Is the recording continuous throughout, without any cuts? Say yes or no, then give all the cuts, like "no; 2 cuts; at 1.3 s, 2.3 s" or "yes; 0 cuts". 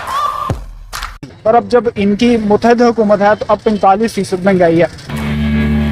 no; 1 cut; at 1.3 s